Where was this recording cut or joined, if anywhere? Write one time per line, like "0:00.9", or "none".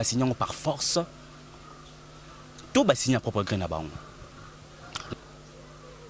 0:05.1